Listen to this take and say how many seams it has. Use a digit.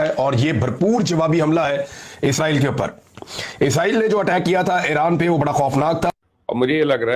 1